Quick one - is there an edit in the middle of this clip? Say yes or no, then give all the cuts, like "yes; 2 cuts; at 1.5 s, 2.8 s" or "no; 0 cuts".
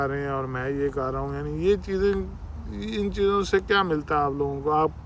no; 0 cuts